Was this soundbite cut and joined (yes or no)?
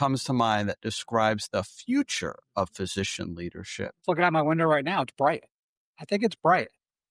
yes